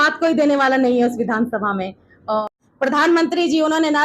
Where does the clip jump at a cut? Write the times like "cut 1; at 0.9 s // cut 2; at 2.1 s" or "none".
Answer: cut 1; at 2.4 s